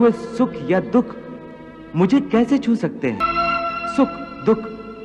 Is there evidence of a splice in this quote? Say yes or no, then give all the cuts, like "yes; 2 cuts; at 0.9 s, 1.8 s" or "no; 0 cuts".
yes; 1 cut; at 3.2 s